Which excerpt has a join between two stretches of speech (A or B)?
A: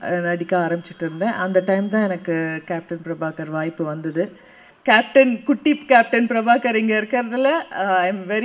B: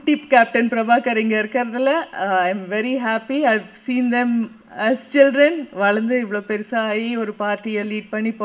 A